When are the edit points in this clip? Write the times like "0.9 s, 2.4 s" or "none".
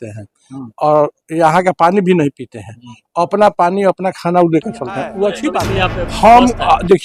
5.6 s